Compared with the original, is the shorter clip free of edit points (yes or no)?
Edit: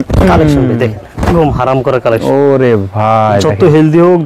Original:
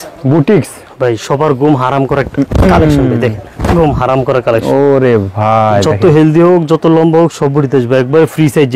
yes